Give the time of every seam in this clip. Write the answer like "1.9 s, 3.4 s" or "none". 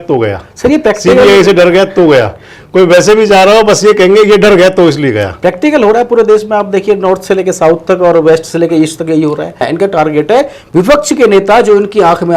9.6 s